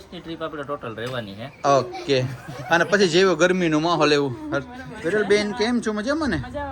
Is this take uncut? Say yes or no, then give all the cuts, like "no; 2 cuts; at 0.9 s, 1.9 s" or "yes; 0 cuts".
yes; 0 cuts